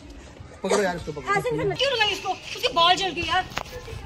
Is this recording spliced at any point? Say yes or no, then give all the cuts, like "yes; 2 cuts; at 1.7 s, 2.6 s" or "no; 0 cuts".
yes; 1 cut; at 1.8 s